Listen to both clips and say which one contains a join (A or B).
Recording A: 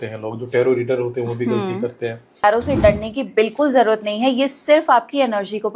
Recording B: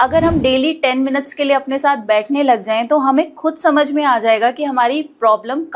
A